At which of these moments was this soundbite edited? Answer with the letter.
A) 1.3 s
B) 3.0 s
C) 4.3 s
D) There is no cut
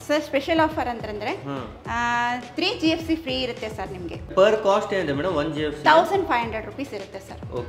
C